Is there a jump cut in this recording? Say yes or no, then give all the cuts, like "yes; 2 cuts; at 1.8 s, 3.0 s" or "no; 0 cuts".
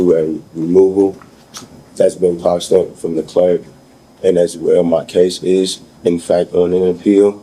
no; 0 cuts